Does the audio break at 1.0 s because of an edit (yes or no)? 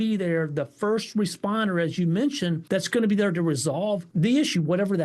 no